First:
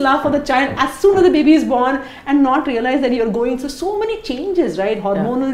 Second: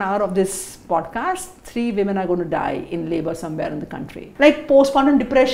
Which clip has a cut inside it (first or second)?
second